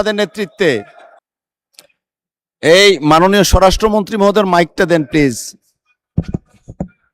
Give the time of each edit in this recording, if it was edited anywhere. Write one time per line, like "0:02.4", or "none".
0:01.2